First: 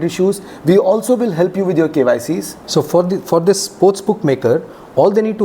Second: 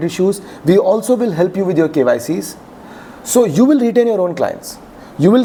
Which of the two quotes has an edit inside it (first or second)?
first